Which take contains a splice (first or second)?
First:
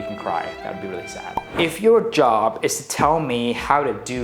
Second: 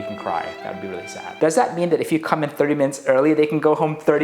second